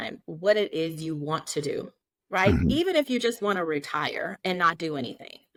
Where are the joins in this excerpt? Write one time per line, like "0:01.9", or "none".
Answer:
none